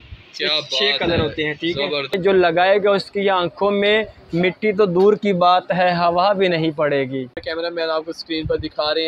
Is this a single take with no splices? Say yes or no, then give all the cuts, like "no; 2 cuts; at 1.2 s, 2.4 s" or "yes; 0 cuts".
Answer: no; 2 cuts; at 2.1 s, 7.4 s